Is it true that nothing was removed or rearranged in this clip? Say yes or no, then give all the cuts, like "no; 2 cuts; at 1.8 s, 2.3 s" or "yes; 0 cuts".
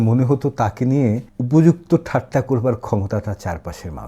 no; 1 cut; at 1.3 s